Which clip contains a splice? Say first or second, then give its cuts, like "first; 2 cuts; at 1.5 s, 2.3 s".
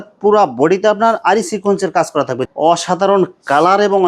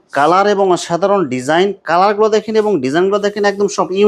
first; 1 cut; at 2.4 s